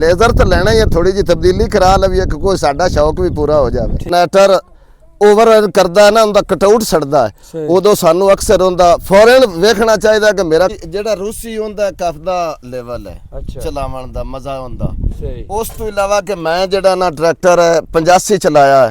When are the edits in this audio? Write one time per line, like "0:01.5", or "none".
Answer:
0:04.1
0:10.8